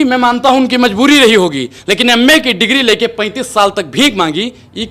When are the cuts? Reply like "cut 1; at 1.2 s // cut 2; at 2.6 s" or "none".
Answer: none

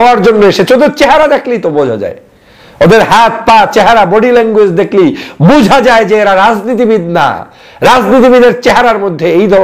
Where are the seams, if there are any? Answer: none

